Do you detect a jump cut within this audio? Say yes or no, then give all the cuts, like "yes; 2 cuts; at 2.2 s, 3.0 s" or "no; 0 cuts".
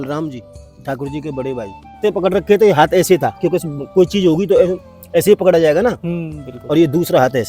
yes; 1 cut; at 1.9 s